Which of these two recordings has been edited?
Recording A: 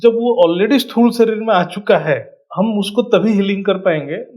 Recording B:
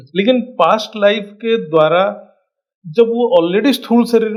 A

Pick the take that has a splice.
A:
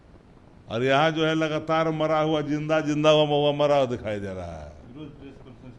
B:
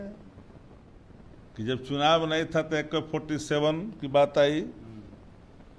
B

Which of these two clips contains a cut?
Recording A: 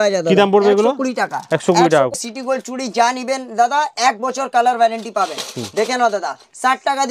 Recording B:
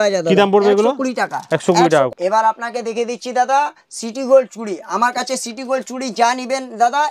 A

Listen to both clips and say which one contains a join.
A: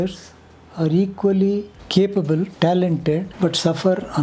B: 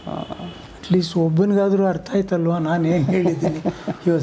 A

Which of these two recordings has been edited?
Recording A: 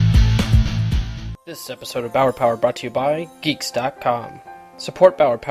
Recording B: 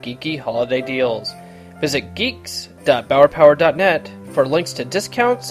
A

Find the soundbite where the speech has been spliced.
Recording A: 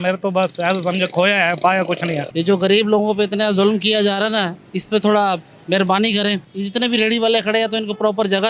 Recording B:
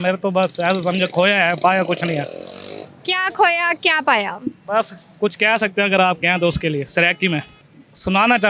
A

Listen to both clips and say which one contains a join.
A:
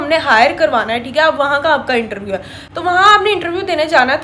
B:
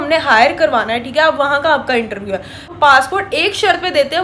B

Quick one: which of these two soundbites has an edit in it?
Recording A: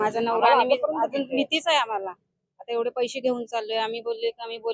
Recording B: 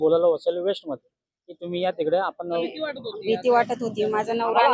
B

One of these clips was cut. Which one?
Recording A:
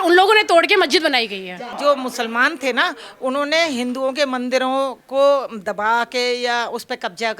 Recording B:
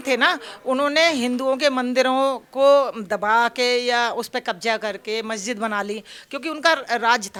A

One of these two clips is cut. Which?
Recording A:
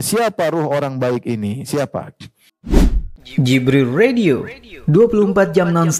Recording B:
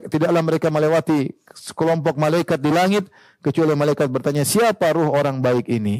A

